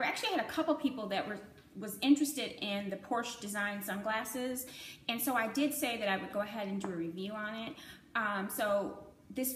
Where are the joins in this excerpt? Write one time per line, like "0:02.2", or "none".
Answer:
0:04.5